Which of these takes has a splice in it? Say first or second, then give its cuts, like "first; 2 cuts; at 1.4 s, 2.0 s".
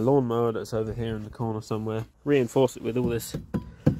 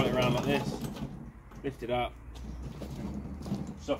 first; 1 cut; at 2.1 s